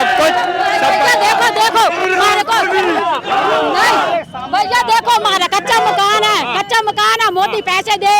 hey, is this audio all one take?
yes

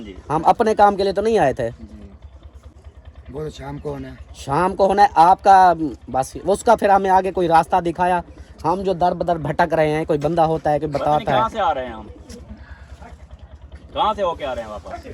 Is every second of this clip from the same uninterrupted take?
yes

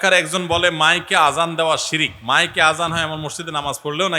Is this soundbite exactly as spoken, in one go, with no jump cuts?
no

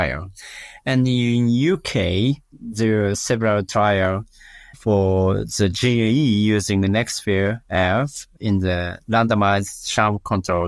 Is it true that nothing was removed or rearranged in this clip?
yes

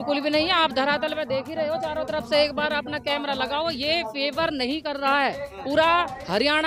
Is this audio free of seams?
yes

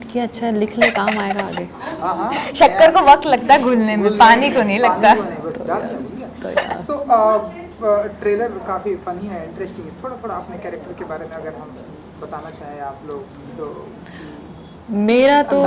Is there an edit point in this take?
no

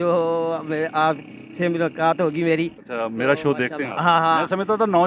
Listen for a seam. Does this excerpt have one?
yes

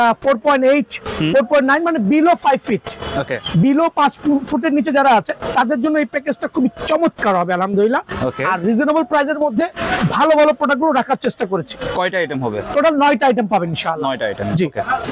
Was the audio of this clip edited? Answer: no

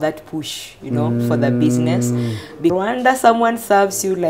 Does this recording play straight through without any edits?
no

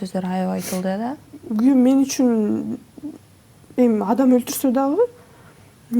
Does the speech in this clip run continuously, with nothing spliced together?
no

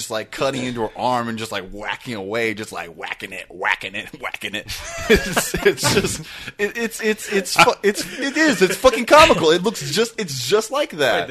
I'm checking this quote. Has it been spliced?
no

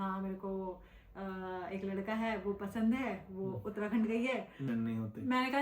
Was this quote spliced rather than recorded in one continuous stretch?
yes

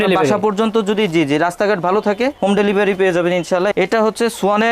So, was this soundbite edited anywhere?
yes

